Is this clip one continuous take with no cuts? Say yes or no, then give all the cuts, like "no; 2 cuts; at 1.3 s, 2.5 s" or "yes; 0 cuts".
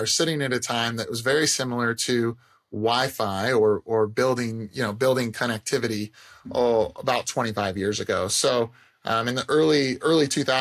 yes; 0 cuts